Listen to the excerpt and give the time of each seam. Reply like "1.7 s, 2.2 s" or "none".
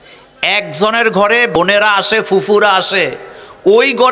1.6 s